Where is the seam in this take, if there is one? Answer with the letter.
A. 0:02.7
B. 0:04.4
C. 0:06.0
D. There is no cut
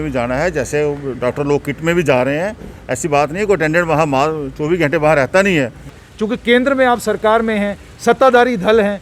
C